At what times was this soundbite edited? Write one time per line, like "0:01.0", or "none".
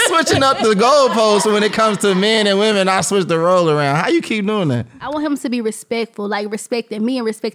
0:05.1